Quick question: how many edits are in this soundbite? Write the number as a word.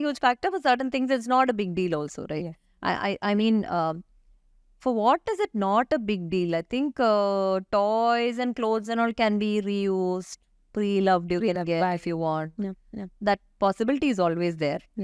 zero